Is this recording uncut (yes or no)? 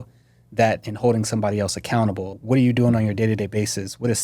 no